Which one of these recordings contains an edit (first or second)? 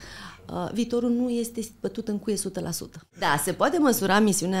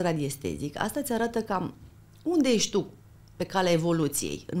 first